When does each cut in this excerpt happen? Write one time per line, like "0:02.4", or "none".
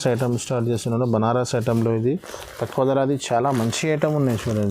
none